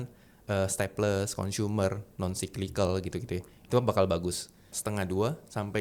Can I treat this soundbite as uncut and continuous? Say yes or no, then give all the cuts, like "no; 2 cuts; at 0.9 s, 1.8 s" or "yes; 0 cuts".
no; 1 cut; at 4.8 s